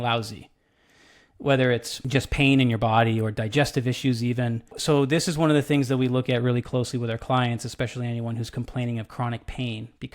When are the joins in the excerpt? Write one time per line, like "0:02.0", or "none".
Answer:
0:01.9
0:04.8